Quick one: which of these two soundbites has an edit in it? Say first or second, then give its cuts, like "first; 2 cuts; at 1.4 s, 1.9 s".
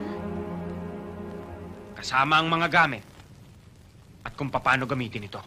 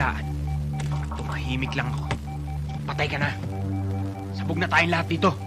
first; 1 cut; at 2.0 s